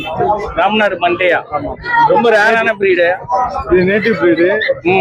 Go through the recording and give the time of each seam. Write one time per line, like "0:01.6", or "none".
none